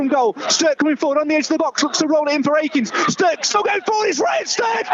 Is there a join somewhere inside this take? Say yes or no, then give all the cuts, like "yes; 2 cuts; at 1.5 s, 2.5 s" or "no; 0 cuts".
no; 0 cuts